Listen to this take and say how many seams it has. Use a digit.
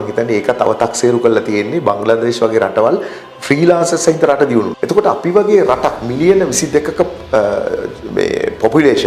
1